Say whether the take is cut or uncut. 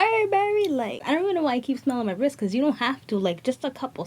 cut